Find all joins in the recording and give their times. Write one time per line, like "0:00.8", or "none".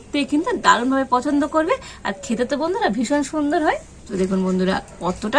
0:04.0